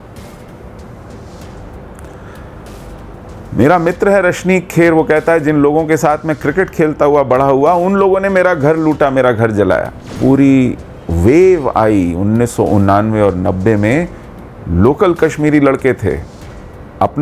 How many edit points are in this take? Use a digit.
1